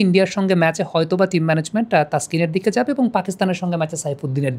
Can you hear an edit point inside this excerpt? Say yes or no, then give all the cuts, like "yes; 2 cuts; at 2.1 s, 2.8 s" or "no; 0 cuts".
no; 0 cuts